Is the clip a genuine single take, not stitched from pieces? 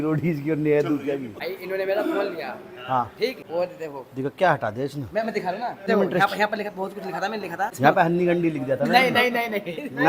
no; 4 cuts; at 1.3 s, 3.4 s, 5.9 s, 7.7 s

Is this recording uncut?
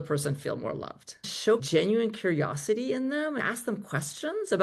no; 2 cuts; at 1.1 s, 3.4 s

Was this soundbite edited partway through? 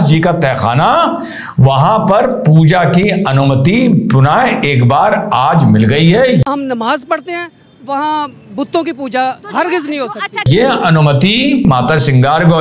yes; 3 cuts; at 6.4 s, 10.5 s, 11.6 s

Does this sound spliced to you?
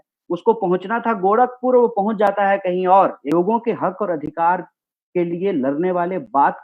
yes; 1 cut; at 3.3 s

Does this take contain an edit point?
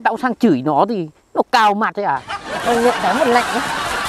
yes; 1 cut; at 2.5 s

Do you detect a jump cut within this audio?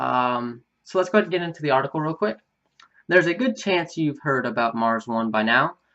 yes; 1 cut; at 3.8 s

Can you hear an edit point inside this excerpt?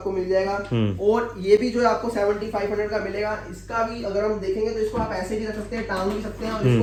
no; 0 cuts

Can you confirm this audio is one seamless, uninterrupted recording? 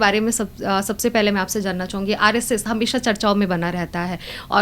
yes; 0 cuts

